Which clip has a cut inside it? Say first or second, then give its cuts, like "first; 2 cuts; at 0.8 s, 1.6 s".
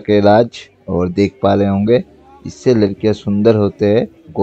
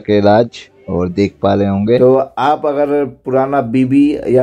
second; 1 cut; at 2.0 s